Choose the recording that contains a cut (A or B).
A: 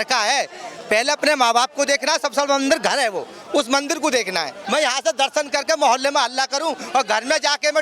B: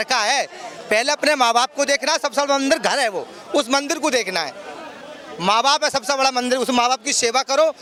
A